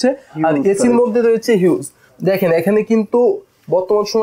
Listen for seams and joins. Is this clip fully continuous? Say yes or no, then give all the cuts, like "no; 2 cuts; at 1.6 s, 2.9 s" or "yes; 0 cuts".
yes; 0 cuts